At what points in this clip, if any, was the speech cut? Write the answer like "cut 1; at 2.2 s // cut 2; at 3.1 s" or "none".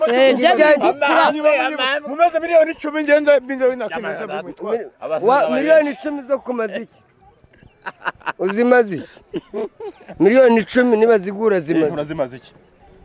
none